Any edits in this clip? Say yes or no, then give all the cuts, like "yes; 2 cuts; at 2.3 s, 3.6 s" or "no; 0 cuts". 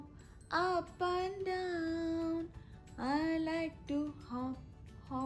no; 0 cuts